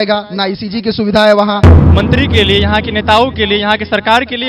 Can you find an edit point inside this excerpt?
yes; 1 cut; at 1.8 s

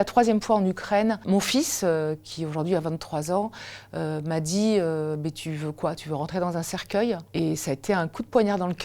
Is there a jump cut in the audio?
no; 0 cuts

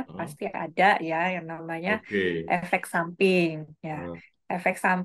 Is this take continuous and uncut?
yes; 0 cuts

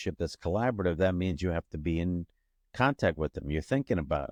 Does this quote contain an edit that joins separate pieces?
no; 0 cuts

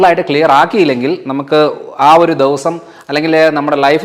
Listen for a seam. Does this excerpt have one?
no; 0 cuts

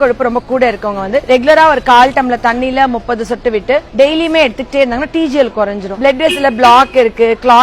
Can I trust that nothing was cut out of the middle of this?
no; 2 cuts; at 3.9 s, 5.9 s

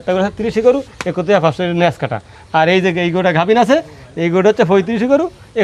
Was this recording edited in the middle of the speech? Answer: no; 0 cuts

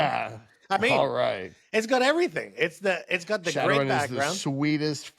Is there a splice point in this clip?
no; 0 cuts

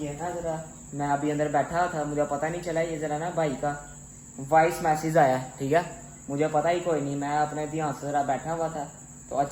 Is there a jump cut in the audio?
no; 0 cuts

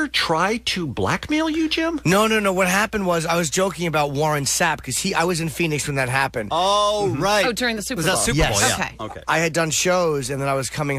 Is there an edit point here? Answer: no; 0 cuts

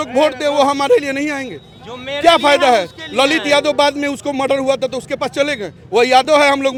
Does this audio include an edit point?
no; 0 cuts

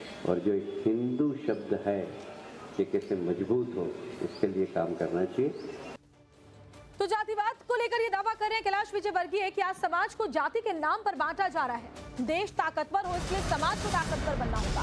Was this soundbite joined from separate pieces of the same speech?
yes; 1 cut; at 8.4 s

